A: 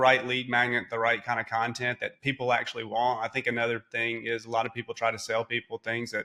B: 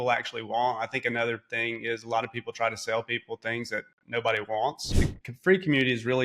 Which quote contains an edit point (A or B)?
B